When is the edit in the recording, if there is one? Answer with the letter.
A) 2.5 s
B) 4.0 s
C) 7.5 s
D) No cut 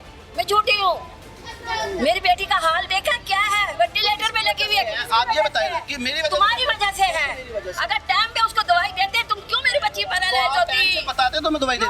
D